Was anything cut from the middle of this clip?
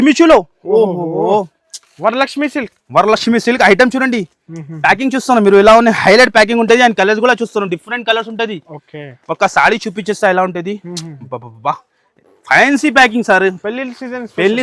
no; 0 cuts

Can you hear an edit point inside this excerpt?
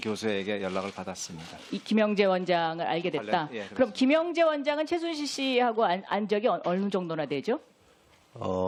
no; 0 cuts

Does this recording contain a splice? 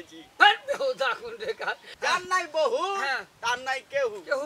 yes; 1 cut; at 1.9 s

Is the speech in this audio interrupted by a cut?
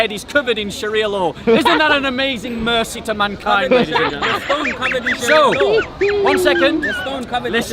no; 0 cuts

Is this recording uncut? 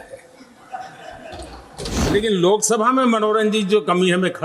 no; 1 cut; at 2.1 s

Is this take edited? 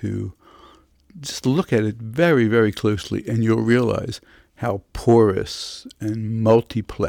no; 0 cuts

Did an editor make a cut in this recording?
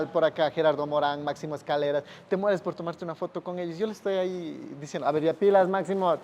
no; 0 cuts

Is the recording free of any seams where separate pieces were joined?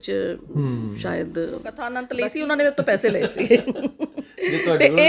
no; 1 cut; at 2.0 s

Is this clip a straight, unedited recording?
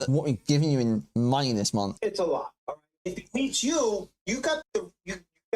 no; 2 cuts; at 1.9 s, 3.1 s

